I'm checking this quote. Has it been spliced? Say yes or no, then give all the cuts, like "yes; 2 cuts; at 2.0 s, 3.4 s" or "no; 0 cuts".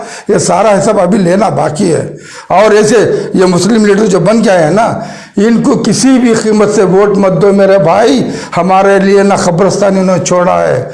yes; 1 cut; at 2.3 s